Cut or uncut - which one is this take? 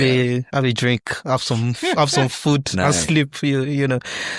uncut